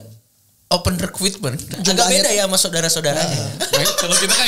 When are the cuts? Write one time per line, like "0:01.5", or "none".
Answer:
0:01.8